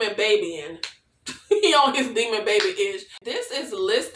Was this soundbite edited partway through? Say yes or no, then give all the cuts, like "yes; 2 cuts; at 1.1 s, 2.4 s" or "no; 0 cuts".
yes; 1 cut; at 3.2 s